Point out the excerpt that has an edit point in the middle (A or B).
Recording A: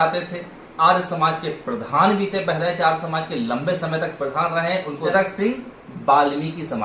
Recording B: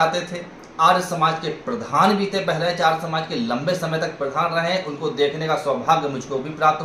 A